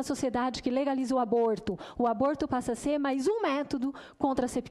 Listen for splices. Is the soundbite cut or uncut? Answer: uncut